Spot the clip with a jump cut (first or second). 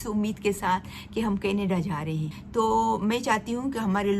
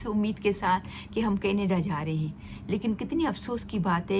first